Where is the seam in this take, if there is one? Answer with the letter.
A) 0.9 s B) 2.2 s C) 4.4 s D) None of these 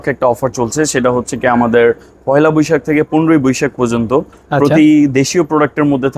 D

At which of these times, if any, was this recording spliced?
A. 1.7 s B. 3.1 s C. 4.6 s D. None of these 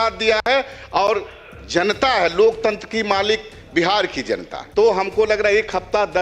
C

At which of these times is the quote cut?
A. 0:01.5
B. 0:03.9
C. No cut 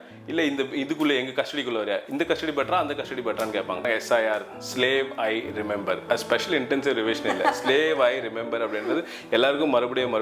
B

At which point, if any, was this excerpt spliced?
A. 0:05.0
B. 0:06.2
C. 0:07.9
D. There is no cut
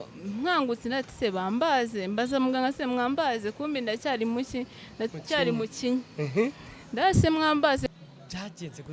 C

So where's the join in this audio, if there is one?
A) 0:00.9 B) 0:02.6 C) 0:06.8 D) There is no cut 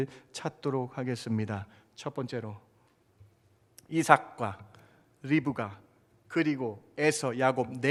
D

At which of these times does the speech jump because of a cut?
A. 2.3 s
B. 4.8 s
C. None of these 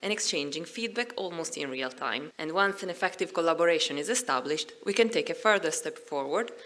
A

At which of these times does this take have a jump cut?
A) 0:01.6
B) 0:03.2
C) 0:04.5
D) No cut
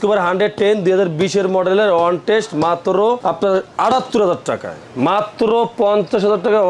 B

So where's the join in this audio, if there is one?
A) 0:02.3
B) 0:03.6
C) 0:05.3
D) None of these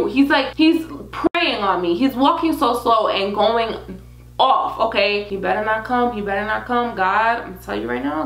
C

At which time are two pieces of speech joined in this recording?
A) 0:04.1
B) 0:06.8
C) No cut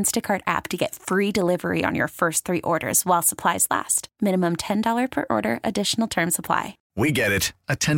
B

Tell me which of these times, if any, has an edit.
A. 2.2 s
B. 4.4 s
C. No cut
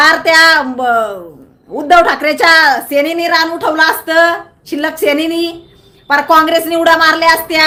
C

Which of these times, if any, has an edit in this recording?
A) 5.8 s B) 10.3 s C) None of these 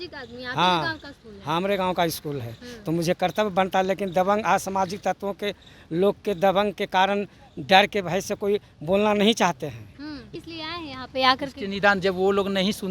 B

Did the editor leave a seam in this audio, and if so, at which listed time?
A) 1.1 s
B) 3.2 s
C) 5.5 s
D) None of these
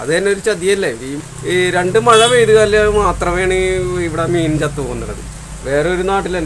A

